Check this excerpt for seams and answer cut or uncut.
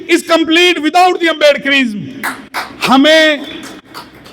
uncut